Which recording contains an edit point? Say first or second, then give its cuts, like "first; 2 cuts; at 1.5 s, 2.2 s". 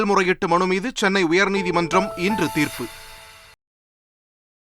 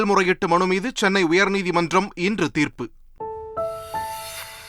second; 1 cut; at 3.4 s